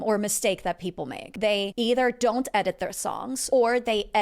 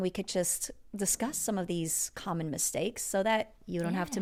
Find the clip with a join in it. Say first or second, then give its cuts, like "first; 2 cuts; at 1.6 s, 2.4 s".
first; 2 cuts; at 1.5 s, 3.3 s